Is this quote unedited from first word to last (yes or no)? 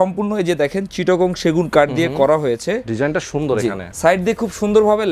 no